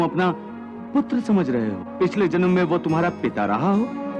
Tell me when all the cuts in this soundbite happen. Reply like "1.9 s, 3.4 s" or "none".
1.8 s